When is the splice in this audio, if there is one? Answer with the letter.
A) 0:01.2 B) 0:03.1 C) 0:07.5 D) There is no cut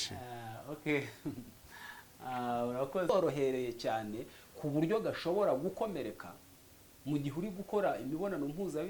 B